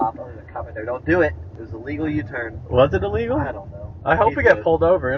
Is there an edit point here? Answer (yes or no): no